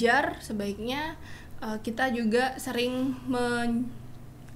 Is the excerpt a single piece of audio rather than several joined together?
yes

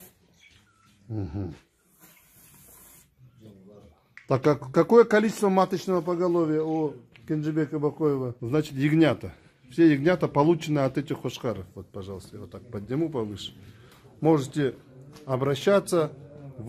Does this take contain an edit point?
yes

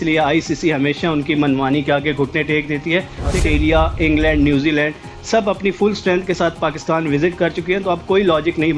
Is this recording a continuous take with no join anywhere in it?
no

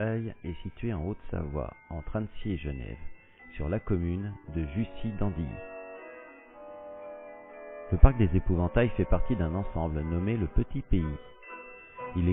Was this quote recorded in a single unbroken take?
yes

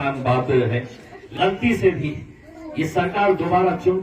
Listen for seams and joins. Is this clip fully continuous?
no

